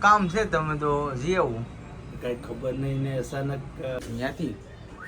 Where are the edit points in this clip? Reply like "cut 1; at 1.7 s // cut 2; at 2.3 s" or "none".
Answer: cut 1; at 4.0 s